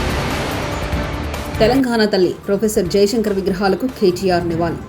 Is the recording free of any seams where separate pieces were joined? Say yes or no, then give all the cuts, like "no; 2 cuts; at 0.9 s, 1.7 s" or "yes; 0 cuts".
no; 1 cut; at 1.5 s